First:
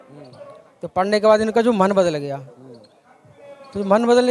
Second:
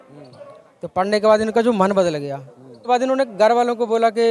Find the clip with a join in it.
second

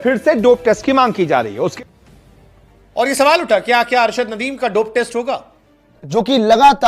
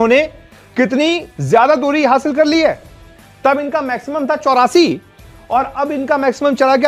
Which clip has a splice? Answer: first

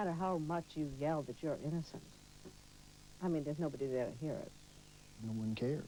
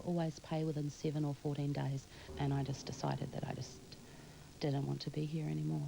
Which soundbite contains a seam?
second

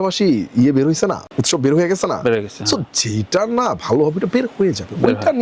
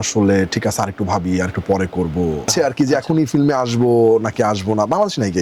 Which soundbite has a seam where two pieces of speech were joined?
first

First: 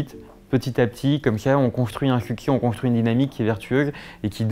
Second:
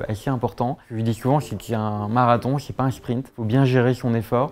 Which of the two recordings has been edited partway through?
second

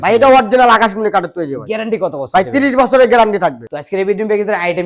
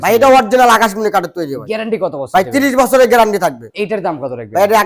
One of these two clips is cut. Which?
first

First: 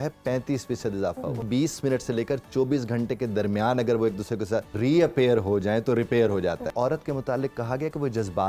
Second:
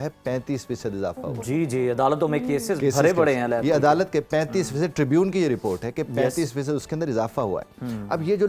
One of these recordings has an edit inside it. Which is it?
first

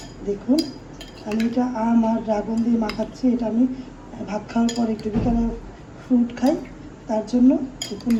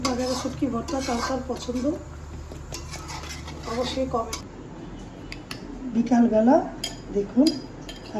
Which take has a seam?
second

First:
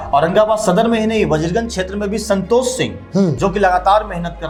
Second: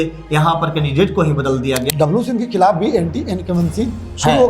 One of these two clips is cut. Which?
second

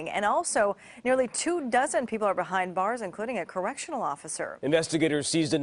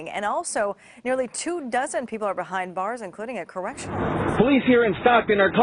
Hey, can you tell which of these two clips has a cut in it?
second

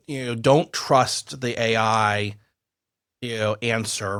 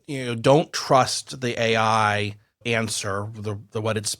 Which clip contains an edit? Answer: second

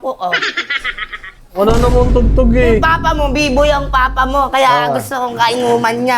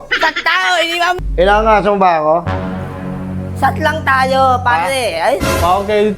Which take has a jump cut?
second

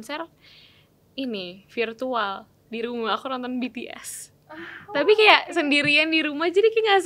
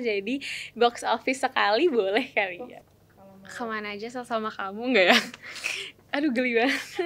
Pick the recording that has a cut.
second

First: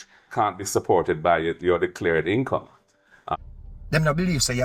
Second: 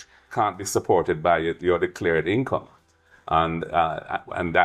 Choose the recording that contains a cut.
first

